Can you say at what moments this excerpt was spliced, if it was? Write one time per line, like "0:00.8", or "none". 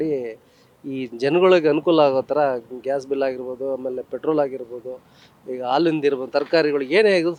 none